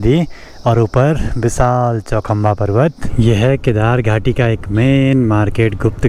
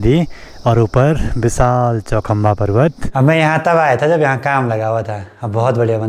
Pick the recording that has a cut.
second; 1 cut; at 3.0 s

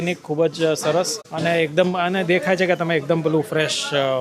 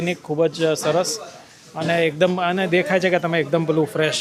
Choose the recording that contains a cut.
first; 1 cut; at 1.2 s

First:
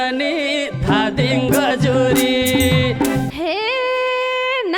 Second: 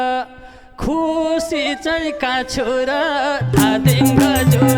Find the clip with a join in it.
first; 1 cut; at 3.2 s

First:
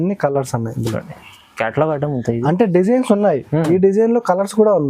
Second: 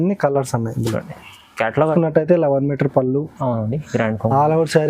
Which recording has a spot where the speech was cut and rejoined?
second; 1 cut; at 1.9 s

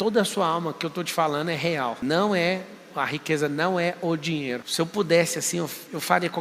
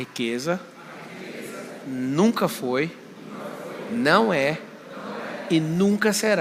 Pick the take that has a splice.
first; 2 cuts; at 2.0 s, 4.7 s

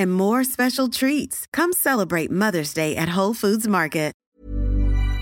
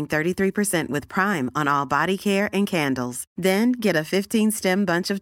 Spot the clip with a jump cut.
first; 1 cut; at 4.2 s

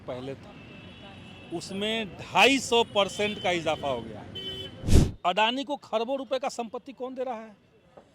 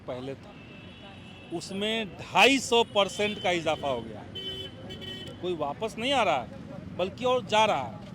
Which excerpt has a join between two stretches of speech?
first; 1 cut; at 4.8 s

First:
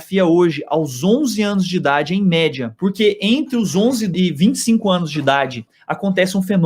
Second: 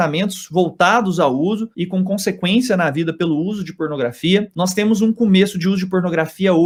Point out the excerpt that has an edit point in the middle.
first; 3 cuts; at 2.7 s, 4.1 s, 5.7 s

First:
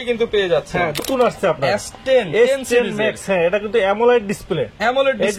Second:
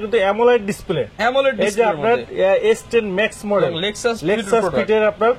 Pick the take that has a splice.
first; 1 cut; at 1.0 s

